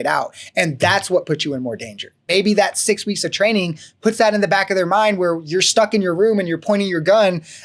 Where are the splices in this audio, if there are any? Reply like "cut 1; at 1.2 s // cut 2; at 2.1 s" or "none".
cut 1; at 2.2 s